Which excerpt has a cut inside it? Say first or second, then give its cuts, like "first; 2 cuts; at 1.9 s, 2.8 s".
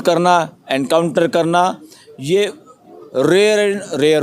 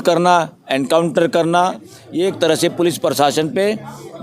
second; 1 cut; at 2.0 s